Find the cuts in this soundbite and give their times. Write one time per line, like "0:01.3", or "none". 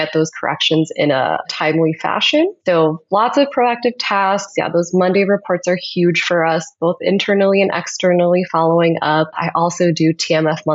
0:01.5
0:02.6